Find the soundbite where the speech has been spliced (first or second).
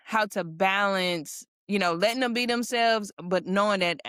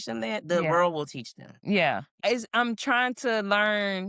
second